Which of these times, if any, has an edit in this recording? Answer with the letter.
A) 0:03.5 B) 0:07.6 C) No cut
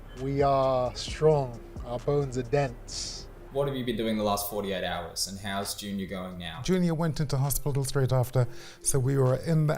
A